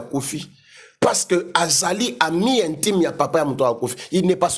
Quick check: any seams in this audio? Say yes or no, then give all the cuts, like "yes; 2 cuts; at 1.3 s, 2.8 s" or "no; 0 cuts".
no; 0 cuts